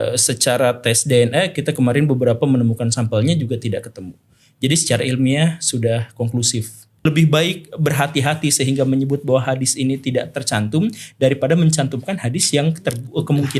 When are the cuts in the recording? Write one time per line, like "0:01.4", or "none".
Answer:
0:07.1